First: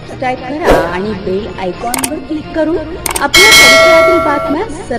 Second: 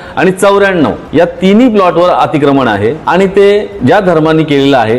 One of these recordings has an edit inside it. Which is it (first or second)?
second